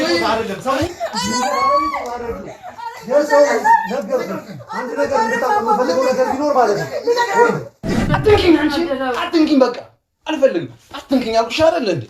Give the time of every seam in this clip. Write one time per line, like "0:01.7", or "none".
0:08.0